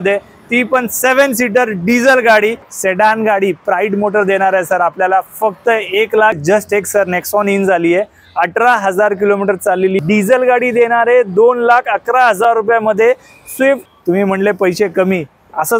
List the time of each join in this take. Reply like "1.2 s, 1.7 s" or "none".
2.7 s, 6.4 s, 10.0 s, 13.9 s